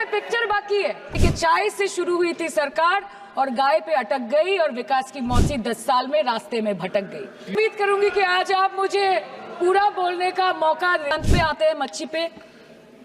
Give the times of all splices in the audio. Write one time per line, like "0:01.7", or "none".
0:01.2
0:07.5
0:11.1